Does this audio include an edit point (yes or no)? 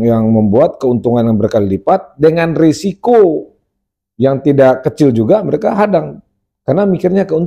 no